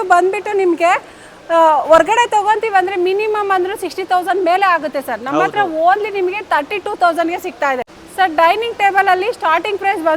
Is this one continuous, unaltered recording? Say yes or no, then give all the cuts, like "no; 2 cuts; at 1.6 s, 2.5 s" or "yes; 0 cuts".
no; 1 cut; at 7.9 s